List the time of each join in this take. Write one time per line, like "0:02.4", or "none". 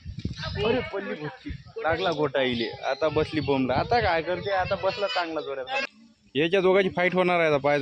0:05.9